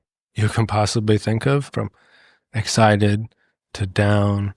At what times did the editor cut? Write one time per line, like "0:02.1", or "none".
0:01.7